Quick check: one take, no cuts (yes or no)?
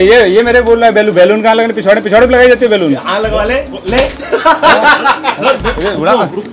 no